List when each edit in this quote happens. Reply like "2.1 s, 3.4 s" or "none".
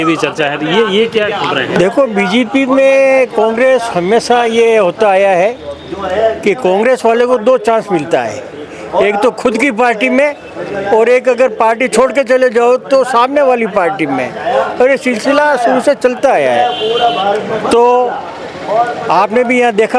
none